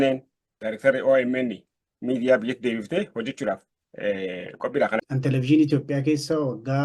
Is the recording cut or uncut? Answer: cut